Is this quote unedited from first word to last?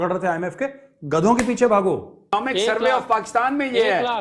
no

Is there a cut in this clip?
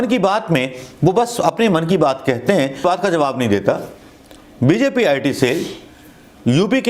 yes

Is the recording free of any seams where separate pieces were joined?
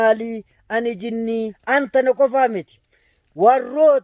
no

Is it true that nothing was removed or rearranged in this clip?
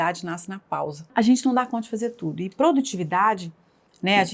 no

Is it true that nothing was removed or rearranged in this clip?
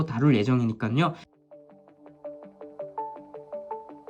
no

